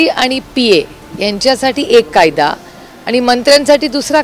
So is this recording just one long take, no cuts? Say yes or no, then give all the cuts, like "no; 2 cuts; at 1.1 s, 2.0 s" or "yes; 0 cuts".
yes; 0 cuts